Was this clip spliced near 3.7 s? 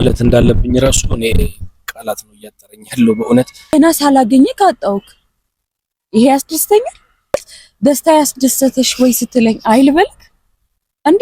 yes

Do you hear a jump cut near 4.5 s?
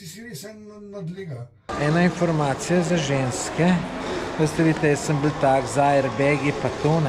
no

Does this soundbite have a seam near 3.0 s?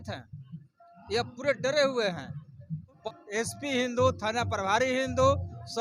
yes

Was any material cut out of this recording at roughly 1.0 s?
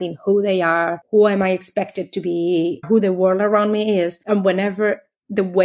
yes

